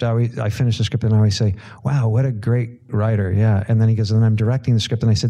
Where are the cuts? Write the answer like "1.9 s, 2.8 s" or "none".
2.9 s